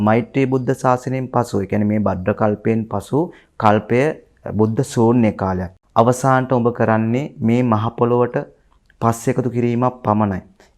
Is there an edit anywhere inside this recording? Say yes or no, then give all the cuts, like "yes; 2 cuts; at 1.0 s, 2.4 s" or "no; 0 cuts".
yes; 1 cut; at 5.7 s